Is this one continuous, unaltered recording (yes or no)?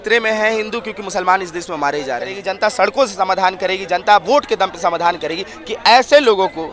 no